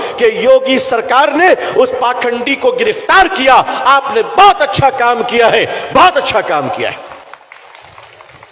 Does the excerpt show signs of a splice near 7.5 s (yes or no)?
yes